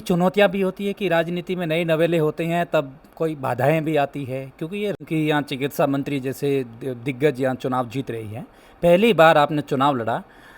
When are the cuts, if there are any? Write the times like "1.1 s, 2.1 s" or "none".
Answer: 5.0 s